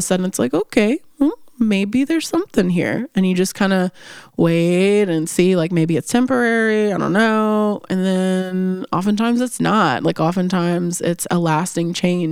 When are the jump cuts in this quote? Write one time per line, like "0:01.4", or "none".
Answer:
none

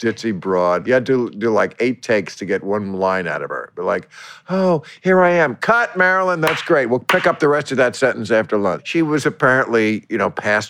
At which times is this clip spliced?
0:00.8
0:08.8

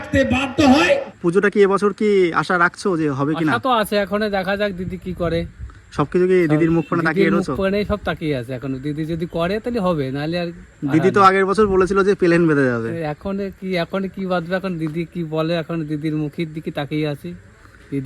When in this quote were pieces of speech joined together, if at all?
0:01.2

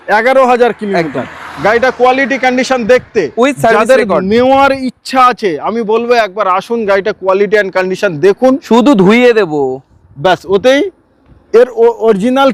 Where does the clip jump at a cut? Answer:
none

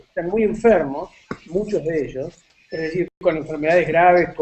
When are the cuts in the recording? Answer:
none

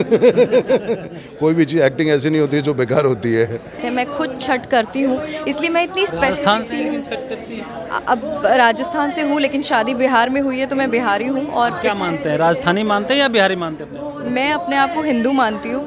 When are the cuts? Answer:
0:03.8

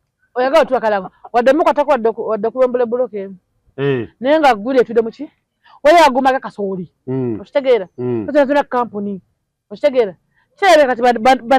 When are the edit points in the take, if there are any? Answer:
none

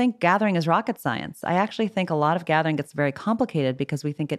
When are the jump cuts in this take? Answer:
none

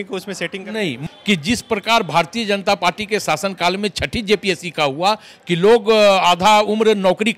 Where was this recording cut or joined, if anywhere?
0:01.0

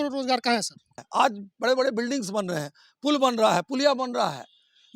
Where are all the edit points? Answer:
0:00.9

